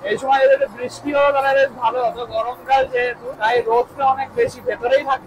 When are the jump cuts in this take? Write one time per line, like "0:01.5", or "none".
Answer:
0:03.3